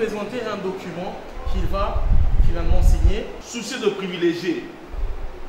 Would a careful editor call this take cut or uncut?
cut